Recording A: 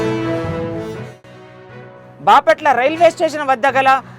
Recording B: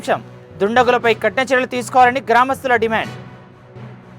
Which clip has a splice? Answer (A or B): A